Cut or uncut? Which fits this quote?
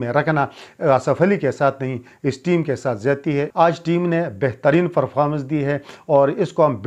cut